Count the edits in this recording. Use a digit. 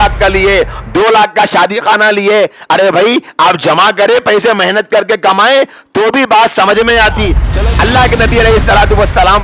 1